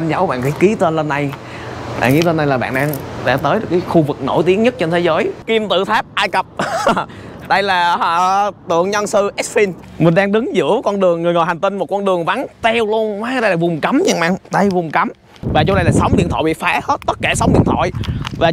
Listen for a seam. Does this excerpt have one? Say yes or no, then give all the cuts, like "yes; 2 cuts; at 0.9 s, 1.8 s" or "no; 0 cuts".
yes; 3 cuts; at 5.4 s, 9.8 s, 15.4 s